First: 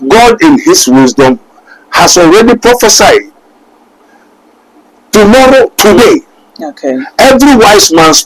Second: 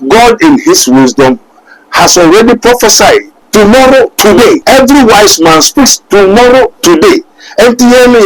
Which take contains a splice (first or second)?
second